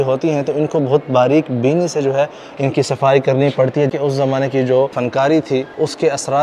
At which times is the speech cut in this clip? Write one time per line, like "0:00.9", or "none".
0:03.9
0:05.3